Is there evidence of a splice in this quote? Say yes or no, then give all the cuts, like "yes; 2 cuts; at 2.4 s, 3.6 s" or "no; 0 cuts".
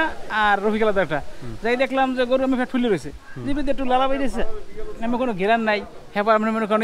no; 0 cuts